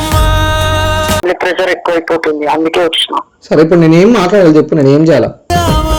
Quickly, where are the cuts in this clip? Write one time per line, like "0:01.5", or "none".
0:01.2